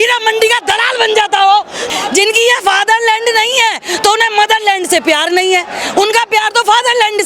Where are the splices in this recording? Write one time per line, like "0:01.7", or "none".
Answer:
0:01.8